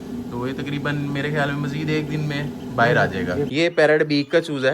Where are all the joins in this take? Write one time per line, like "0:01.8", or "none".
0:03.5